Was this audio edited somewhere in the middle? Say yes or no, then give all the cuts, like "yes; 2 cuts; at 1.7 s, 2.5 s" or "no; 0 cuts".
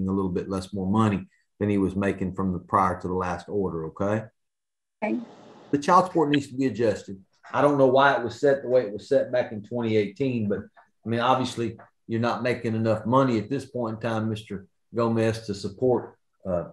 yes; 1 cut; at 5.7 s